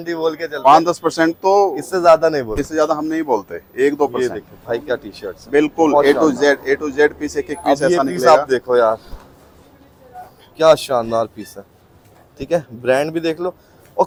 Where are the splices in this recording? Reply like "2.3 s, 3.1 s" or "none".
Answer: none

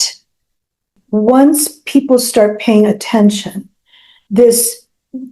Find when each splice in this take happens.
1.0 s

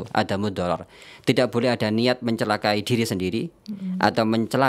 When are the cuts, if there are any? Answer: none

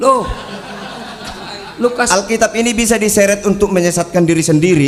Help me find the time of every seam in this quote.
none

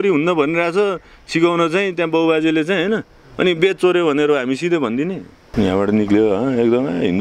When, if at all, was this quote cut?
5.3 s

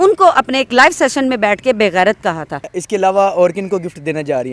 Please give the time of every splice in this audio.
2.7 s

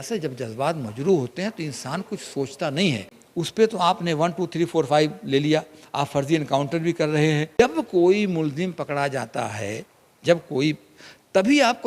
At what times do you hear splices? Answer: 3.2 s, 7.5 s

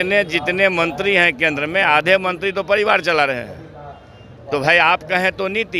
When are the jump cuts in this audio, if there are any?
none

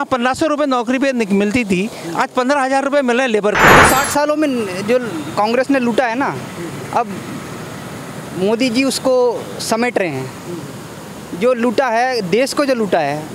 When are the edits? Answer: 3.7 s

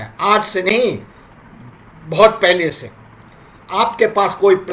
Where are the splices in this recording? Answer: none

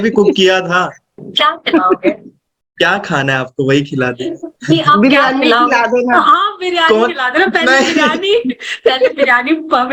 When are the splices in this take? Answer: 1.3 s

